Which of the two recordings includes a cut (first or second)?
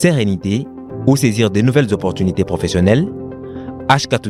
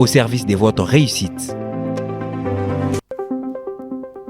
second